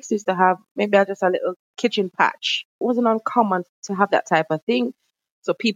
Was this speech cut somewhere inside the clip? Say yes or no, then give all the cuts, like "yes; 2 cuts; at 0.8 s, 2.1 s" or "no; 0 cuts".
yes; 4 cuts; at 1.7 s, 2.8 s, 3.7 s, 4.9 s